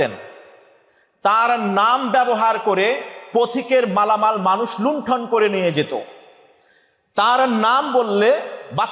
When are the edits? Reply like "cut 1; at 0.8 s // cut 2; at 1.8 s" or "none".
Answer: none

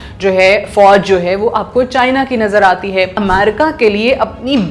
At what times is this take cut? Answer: cut 1; at 3.2 s

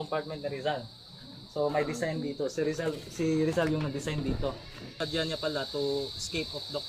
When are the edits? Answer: cut 1; at 5.0 s

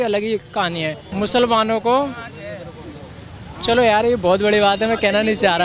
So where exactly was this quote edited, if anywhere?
cut 1; at 1.0 s

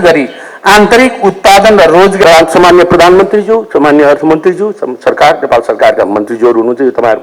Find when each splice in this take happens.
cut 1; at 2.2 s

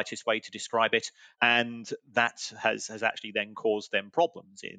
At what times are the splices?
cut 1; at 1.2 s

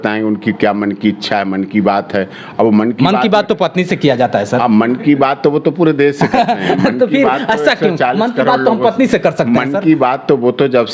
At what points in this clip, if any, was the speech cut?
none

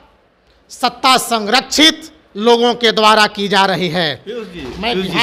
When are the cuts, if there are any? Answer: none

